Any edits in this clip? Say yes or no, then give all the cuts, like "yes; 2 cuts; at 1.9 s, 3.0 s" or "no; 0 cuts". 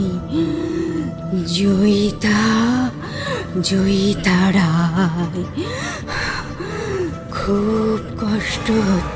no; 0 cuts